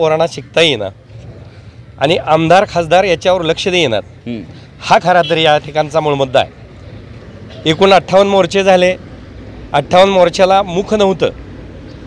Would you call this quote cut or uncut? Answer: uncut